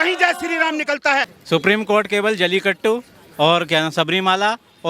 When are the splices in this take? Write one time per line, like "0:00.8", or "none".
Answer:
0:01.3